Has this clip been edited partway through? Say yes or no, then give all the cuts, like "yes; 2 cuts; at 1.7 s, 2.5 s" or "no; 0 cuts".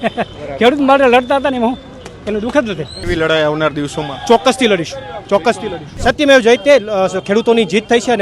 yes; 2 cuts; at 3.0 s, 6.0 s